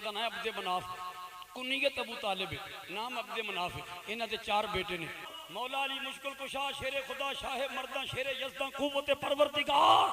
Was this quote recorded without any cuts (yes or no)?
no